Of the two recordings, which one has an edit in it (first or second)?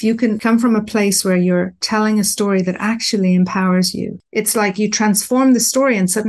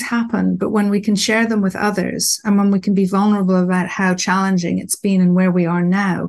first